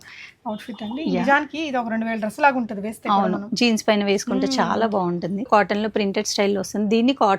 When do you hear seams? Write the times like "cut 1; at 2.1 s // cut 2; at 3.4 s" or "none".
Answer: cut 1; at 5.5 s